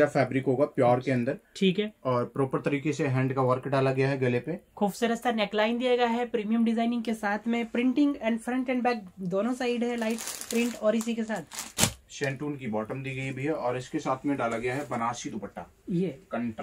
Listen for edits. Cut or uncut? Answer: uncut